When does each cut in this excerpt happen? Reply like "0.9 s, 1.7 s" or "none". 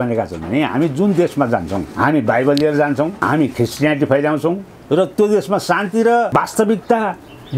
1.9 s, 3.2 s, 6.3 s